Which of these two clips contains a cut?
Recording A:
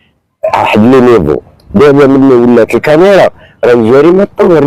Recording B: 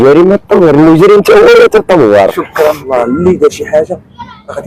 B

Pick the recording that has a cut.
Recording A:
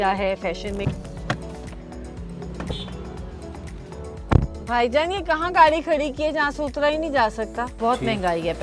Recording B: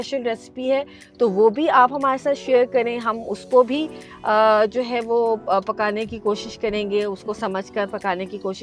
A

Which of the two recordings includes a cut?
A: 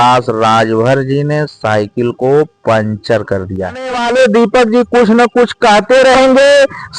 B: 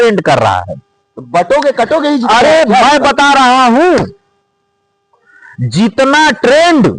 A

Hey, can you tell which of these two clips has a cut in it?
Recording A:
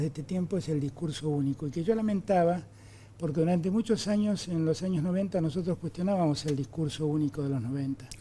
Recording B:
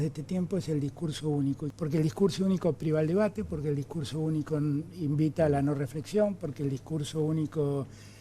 B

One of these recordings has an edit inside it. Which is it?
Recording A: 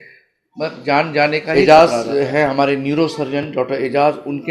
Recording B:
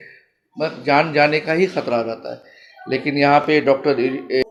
A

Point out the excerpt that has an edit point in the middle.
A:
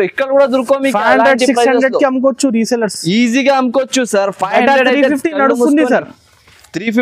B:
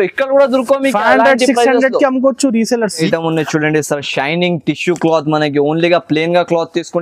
B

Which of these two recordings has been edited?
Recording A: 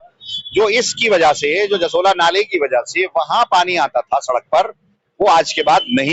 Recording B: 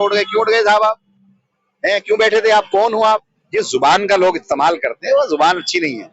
B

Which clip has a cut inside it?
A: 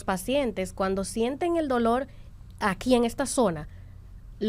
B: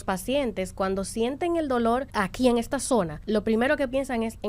B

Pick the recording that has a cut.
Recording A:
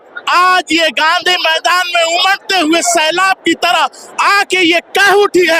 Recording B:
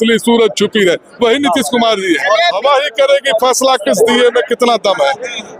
B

